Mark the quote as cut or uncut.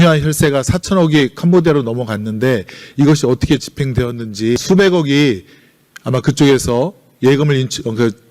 cut